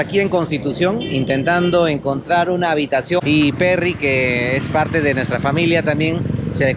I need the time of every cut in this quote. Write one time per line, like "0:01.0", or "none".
0:03.2